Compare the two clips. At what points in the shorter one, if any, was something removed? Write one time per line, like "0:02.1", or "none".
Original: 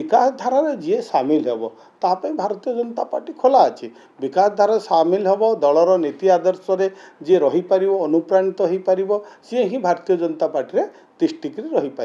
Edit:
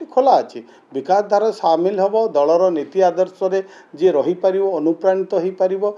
none